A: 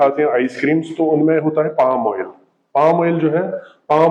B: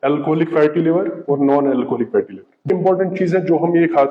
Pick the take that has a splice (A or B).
B